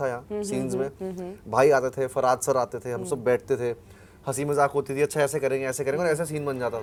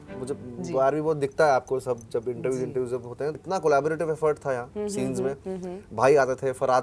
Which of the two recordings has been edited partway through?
second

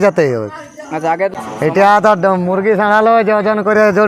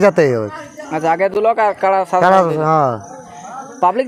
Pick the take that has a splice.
first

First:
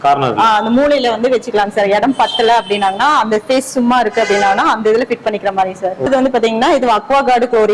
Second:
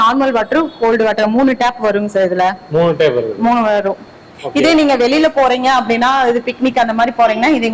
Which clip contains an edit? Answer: first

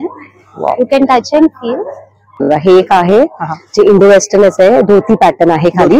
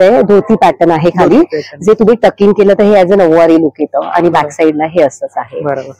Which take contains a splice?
first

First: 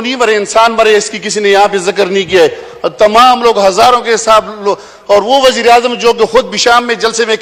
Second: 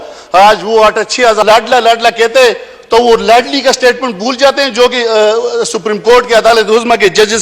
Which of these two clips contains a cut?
second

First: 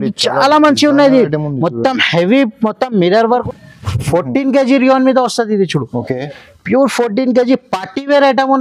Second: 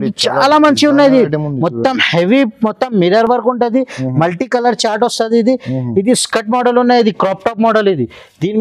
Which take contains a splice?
first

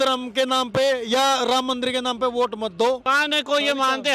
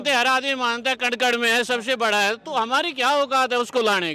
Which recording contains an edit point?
first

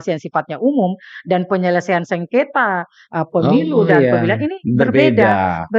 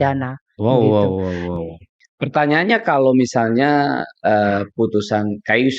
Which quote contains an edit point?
second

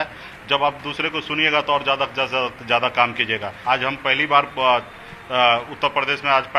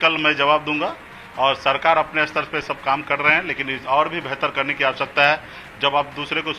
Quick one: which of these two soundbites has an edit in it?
first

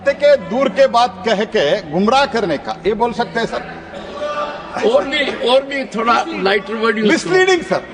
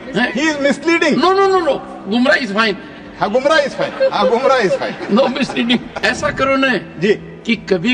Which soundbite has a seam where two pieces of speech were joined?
second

